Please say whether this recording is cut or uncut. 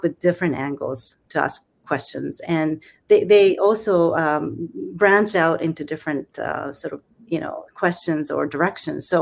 uncut